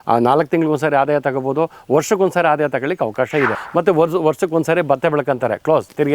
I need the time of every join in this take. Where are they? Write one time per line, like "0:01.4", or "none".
0:03.6